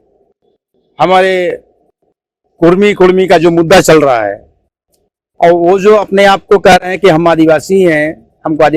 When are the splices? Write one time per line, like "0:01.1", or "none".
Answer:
none